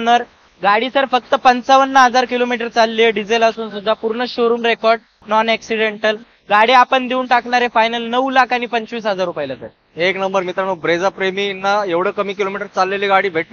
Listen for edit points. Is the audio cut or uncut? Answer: uncut